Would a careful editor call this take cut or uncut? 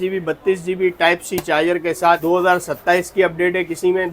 cut